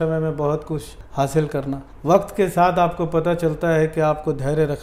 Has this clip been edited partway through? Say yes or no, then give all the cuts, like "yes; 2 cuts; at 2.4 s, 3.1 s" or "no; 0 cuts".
no; 0 cuts